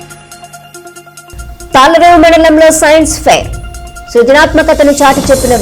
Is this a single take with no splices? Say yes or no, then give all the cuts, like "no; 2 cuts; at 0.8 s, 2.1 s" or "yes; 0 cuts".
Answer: no; 1 cut; at 1.2 s